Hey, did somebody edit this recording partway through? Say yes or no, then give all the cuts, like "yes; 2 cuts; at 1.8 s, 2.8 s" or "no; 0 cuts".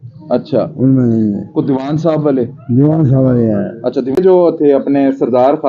yes; 1 cut; at 4.2 s